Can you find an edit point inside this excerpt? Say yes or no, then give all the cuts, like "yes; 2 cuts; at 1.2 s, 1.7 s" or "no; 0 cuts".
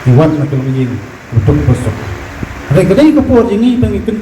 yes; 1 cut; at 2.0 s